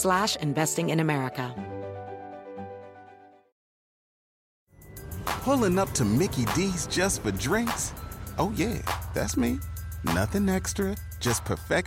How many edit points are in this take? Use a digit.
1